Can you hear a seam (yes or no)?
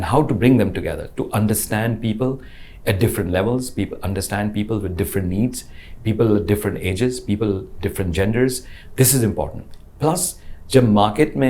no